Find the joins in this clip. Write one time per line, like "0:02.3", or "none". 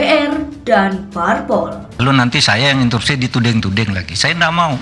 0:01.8